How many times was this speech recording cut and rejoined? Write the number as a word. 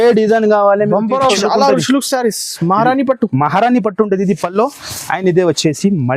one